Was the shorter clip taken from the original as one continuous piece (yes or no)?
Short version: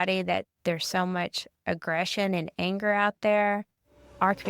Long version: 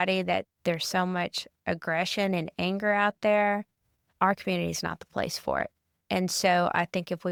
yes